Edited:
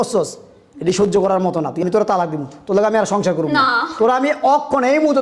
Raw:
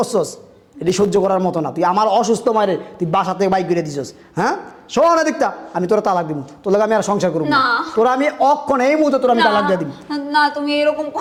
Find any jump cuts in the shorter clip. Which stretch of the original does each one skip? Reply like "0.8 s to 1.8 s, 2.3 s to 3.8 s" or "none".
1.8 s to 5.8 s